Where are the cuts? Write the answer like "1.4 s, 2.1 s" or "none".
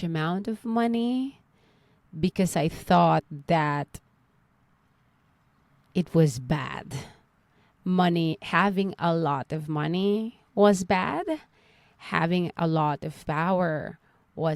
none